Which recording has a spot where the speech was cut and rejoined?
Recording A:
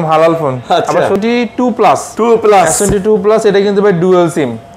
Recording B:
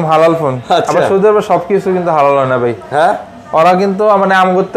A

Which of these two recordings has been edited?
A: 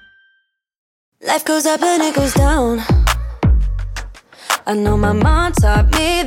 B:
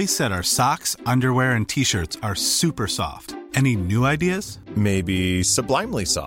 A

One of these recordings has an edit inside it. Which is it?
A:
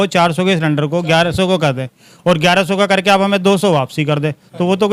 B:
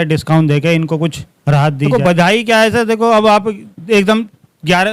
B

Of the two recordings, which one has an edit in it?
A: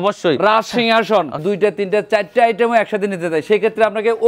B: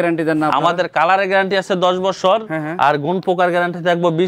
A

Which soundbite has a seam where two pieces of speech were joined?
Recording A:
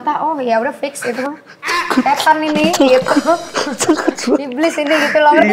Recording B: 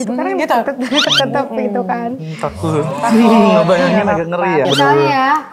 B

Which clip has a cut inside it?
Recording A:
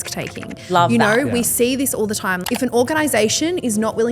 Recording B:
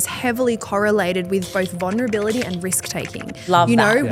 A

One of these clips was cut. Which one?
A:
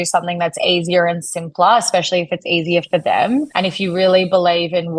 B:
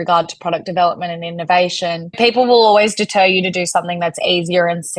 A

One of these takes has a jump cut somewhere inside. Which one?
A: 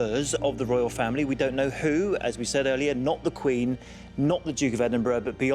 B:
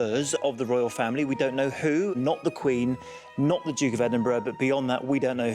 B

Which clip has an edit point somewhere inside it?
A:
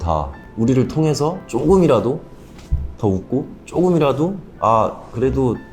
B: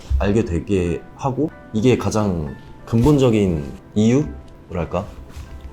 B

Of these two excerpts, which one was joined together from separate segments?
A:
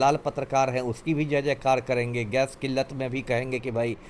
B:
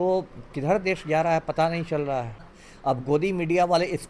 B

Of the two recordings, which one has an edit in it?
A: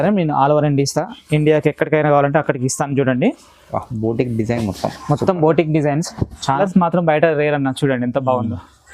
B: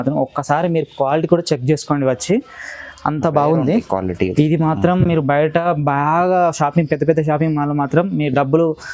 A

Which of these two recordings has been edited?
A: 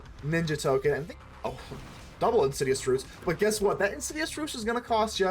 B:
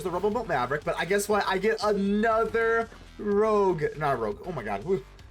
A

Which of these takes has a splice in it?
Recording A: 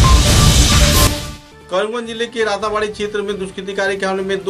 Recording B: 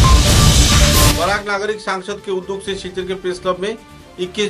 A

